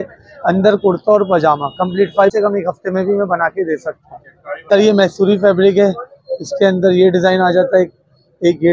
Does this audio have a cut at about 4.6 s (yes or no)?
yes